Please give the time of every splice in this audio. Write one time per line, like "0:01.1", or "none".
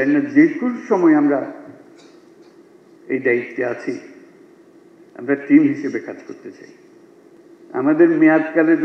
0:07.4

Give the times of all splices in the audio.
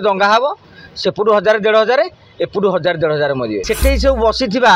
0:03.6

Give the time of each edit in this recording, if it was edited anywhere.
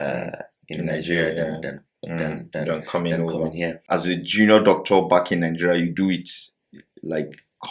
0:03.8

